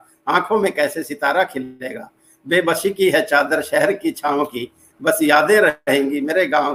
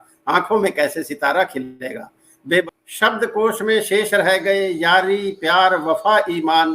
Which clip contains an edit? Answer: second; 1 cut; at 2.6 s

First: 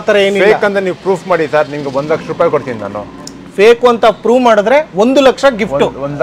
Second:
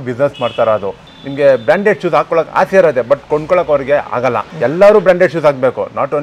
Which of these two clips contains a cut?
second; 2 cuts; at 1.1 s, 4.5 s

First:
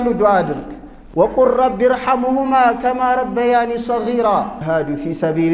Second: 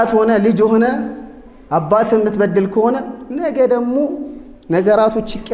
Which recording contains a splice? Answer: first; 1 cut; at 4.6 s

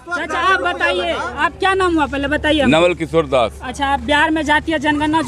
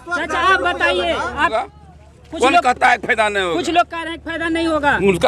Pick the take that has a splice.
second; 1 cut; at 1.5 s

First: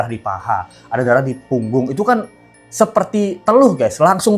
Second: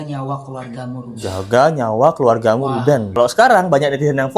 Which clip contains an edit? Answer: second; 1 cut; at 3.2 s

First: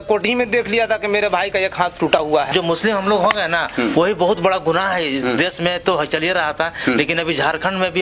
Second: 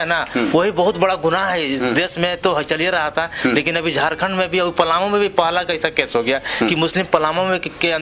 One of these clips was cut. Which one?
first; 1 cut; at 2.5 s

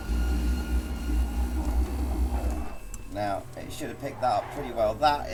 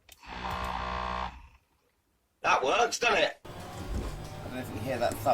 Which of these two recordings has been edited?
second; 1 cut; at 3.5 s

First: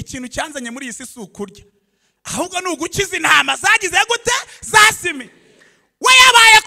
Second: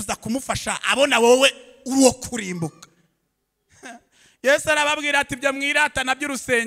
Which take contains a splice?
second; 1 cut; at 4.0 s

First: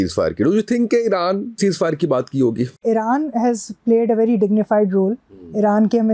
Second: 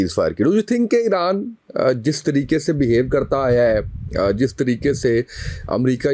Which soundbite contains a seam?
first; 2 cuts; at 1.6 s, 2.8 s

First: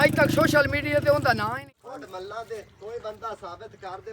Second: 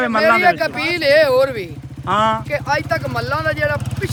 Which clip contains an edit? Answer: first; 1 cut; at 1.6 s

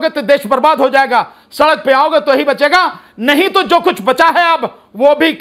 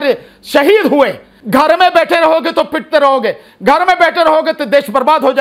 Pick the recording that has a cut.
second; 1 cut; at 1.3 s

